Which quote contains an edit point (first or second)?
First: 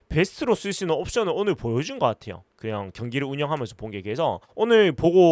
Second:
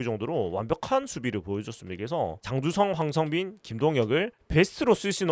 second